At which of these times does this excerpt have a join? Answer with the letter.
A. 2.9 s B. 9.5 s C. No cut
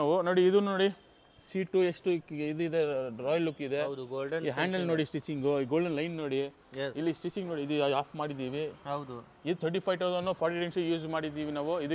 C